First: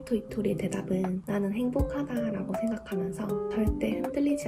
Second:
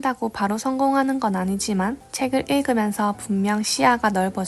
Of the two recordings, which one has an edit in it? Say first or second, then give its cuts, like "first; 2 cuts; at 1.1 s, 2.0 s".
second; 1 cut; at 2.0 s